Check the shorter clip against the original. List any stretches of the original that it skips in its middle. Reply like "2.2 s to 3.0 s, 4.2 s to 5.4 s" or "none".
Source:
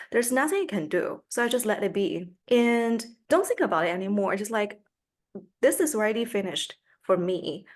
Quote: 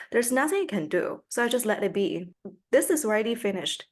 2.3 s to 5.2 s